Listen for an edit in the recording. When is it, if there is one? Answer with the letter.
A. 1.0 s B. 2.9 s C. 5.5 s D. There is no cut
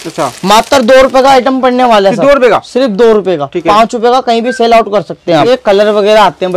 C